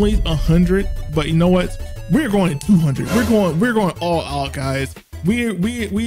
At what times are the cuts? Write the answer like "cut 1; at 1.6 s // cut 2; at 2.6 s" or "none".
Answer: none